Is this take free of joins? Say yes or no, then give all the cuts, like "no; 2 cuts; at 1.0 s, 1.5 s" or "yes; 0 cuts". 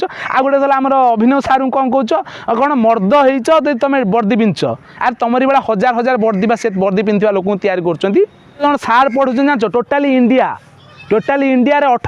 no; 1 cut; at 8.6 s